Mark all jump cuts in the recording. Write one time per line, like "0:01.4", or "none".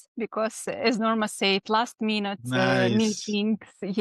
none